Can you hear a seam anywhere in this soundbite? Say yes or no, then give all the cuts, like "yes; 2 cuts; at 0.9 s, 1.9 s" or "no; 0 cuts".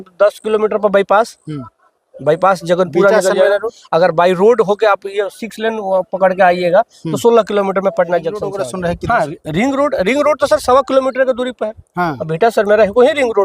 yes; 1 cut; at 8.6 s